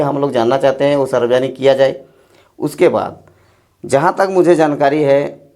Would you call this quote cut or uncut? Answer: uncut